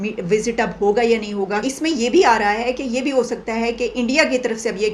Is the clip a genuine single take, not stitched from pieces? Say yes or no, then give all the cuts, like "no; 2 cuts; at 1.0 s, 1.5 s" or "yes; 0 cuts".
yes; 0 cuts